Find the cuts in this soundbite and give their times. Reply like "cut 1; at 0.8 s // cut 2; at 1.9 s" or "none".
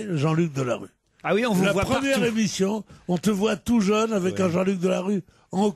cut 1; at 4.8 s